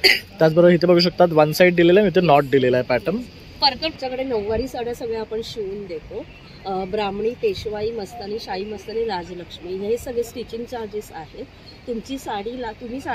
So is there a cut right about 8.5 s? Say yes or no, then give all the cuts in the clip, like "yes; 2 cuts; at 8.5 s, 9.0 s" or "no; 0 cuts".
no; 1 cut; at 4.0 s